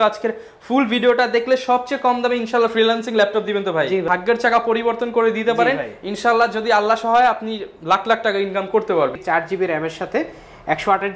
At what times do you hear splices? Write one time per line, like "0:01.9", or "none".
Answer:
0:04.1
0:09.2

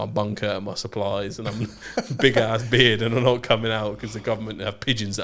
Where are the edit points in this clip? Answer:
none

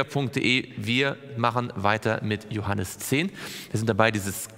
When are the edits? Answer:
0:03.0

